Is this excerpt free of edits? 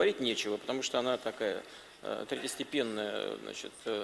no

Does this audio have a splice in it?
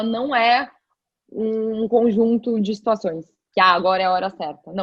no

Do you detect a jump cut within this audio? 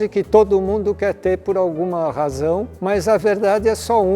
yes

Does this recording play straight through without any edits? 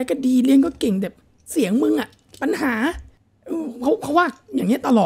yes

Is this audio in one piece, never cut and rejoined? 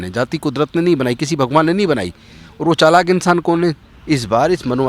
no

